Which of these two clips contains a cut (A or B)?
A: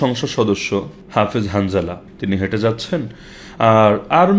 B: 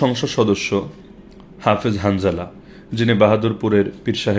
A